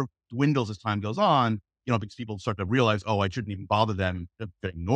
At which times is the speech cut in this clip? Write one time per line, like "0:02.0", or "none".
none